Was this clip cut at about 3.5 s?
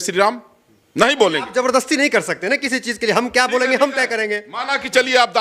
no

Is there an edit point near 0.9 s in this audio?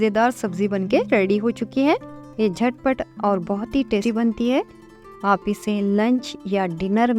no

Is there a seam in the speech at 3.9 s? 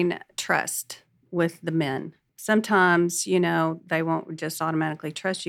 no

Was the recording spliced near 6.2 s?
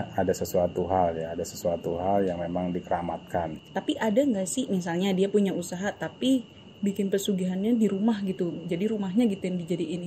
no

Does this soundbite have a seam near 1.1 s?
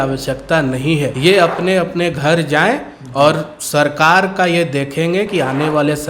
yes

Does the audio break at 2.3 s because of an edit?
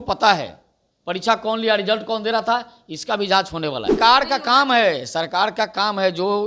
no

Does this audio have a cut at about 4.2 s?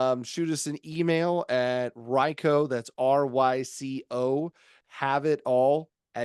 no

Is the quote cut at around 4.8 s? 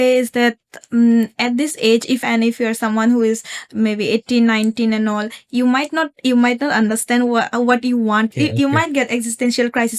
no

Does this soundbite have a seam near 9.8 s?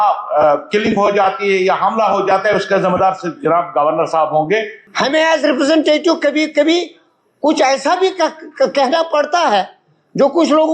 no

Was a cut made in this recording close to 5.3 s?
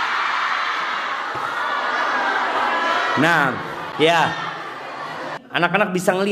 yes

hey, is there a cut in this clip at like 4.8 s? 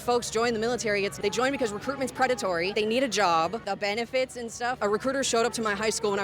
yes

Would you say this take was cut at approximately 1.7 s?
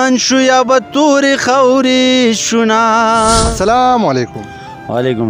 no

